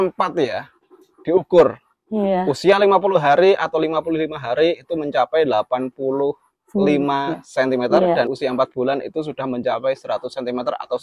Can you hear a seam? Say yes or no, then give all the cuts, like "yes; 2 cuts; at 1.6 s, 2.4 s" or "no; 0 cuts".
no; 0 cuts